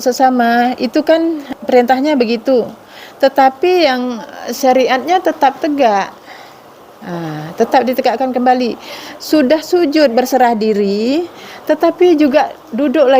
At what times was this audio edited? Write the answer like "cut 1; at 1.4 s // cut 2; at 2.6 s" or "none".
cut 1; at 1.4 s